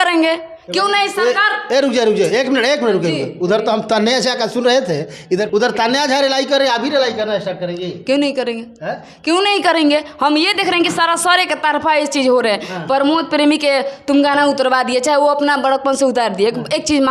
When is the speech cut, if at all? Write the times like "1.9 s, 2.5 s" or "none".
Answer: none